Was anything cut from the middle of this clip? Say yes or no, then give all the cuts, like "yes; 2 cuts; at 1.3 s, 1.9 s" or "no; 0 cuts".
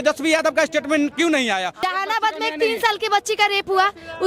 yes; 1 cut; at 1.7 s